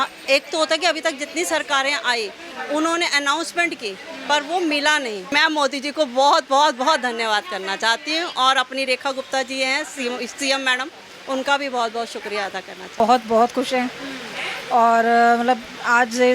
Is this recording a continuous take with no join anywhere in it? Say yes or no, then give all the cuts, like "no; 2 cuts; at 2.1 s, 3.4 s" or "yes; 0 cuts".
no; 2 cuts; at 5.3 s, 13.0 s